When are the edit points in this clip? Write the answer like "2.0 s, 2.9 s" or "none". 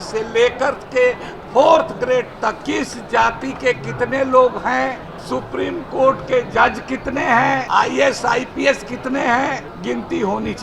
2.6 s, 5.1 s, 7.7 s, 9.7 s